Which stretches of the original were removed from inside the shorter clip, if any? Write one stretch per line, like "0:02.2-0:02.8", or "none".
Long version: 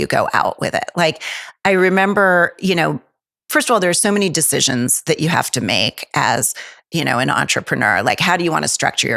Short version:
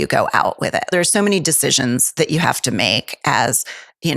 0:00.9-0:03.8